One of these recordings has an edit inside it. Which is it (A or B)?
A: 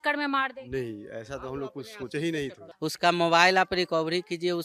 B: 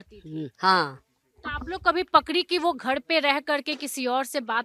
A